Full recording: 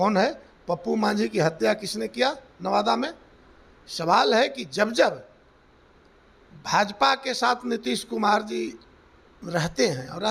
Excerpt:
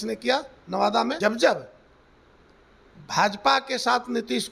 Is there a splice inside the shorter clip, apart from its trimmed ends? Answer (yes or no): yes